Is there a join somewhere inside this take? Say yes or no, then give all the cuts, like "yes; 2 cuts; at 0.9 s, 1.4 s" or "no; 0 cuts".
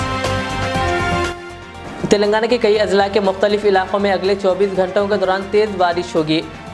yes; 1 cut; at 1.2 s